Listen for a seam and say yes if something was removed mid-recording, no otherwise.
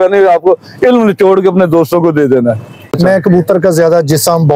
yes